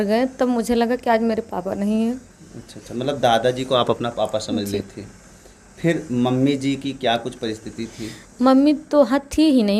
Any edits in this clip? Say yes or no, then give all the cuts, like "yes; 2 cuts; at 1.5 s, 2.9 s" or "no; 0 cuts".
no; 0 cuts